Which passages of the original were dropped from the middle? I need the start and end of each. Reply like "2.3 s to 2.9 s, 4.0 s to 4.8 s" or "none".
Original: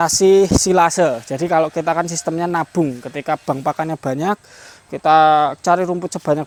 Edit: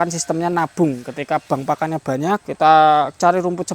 4.5 s to 4.9 s

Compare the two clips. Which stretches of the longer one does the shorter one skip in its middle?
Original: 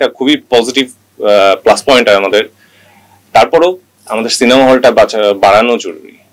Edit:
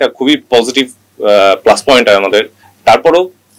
2.6 s to 3.1 s

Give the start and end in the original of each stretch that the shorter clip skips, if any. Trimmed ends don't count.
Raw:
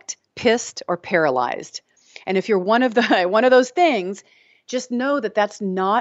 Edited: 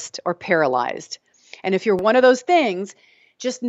2.6 s to 3.3 s

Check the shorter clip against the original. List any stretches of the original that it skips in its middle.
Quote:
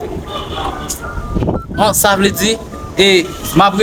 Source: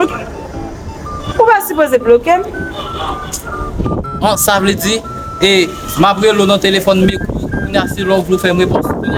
none

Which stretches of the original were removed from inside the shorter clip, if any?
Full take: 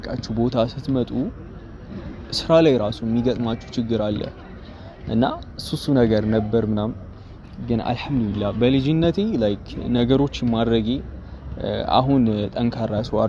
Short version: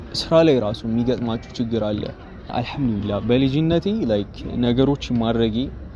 4.7 s to 7.8 s

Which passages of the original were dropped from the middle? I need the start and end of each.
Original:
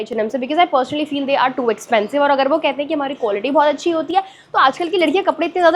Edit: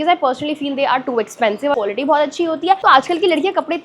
2.2 s to 3.2 s, 4.3 s to 4.5 s

